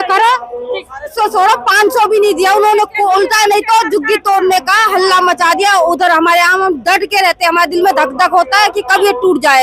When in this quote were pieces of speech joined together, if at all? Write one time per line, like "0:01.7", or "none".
0:01.1

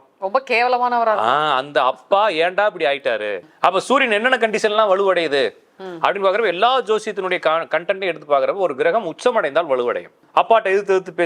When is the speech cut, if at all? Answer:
0:03.4
0:10.1

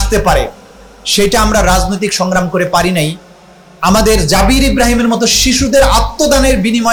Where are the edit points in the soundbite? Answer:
none

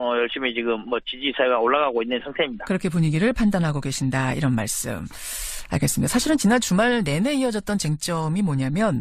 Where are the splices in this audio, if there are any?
0:04.9

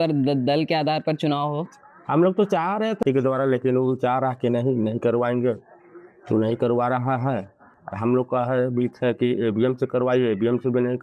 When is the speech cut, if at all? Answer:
0:03.0

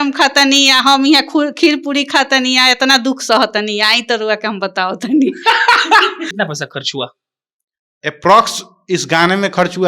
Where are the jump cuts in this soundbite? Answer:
0:06.3

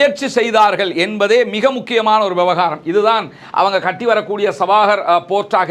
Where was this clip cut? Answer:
none

